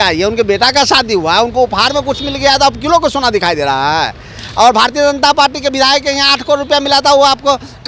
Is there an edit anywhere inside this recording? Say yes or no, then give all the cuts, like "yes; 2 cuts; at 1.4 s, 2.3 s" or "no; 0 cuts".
no; 0 cuts